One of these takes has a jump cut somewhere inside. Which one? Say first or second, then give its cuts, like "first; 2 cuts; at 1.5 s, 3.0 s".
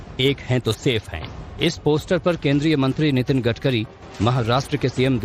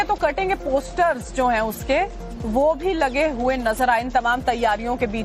second; 1 cut; at 3.4 s